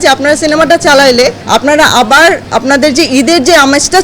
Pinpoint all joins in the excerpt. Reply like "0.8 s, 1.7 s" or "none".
1.4 s, 2.4 s